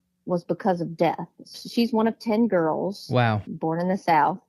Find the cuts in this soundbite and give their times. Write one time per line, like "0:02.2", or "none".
0:01.6